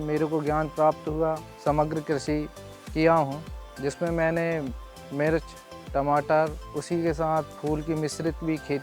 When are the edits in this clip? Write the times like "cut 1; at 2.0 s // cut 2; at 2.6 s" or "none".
cut 1; at 1.5 s // cut 2; at 6.7 s